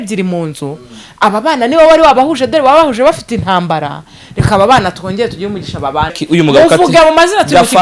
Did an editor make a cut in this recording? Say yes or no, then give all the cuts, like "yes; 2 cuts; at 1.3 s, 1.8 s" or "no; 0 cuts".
yes; 1 cut; at 6.2 s